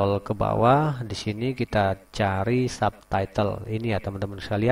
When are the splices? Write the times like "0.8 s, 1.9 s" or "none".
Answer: none

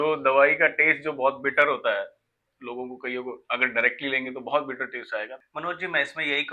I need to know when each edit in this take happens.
5.4 s

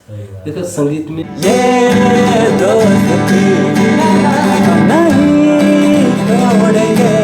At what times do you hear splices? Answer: 1.2 s

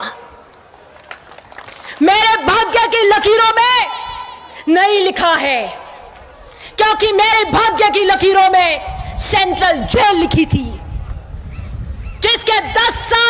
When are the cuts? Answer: none

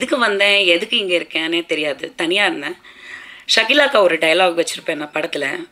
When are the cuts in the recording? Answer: none

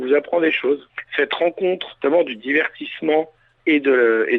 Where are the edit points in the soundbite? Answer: 1.0 s, 1.9 s, 3.5 s

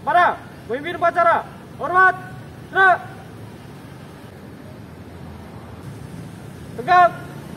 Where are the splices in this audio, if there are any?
4.3 s, 5.8 s

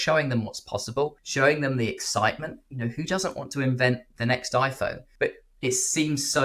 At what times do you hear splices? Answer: none

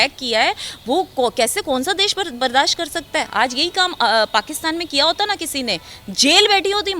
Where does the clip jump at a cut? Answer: none

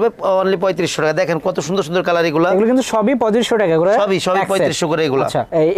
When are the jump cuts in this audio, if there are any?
none

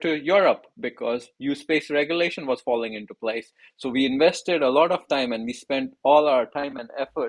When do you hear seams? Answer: none

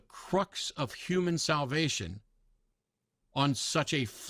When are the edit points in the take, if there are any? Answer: none

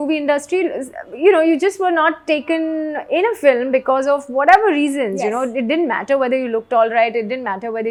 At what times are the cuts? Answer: none

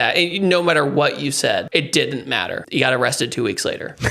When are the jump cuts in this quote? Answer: 1.7 s, 2.6 s

